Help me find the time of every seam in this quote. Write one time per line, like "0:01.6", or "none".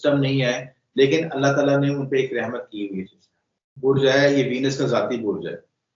0:03.8